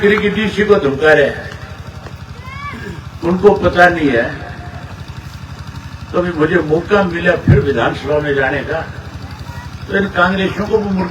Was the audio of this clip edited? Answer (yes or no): no